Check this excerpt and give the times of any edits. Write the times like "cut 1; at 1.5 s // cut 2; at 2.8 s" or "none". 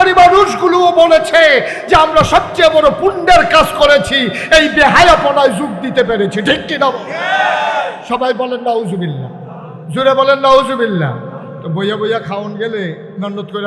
cut 1; at 8.0 s

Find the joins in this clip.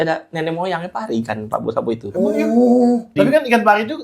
cut 1; at 3.1 s

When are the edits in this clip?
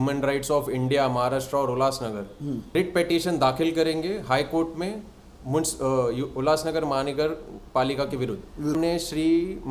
cut 1; at 2.6 s // cut 2; at 8.7 s

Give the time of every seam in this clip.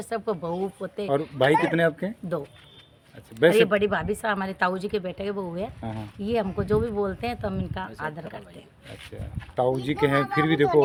none

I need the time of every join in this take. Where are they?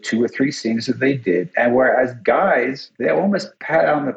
cut 1; at 3.2 s

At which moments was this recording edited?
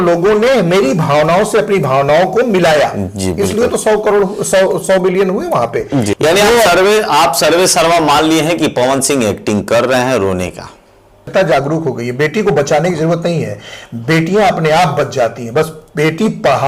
cut 1; at 6.1 s // cut 2; at 11.3 s

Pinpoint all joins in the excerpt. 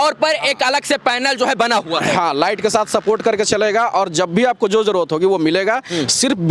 none

